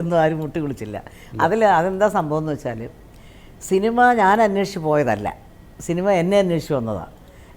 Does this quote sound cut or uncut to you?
uncut